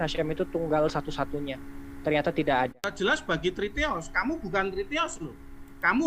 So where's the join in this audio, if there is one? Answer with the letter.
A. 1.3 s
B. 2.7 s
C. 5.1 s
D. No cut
B